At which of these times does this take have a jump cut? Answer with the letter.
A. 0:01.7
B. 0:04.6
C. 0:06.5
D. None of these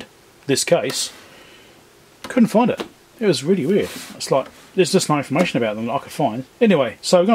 C